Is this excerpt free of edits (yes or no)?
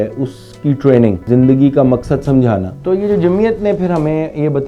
no